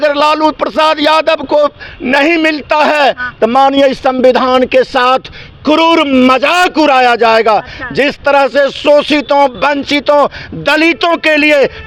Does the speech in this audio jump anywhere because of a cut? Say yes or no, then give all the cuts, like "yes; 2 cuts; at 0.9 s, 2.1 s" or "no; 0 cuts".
no; 0 cuts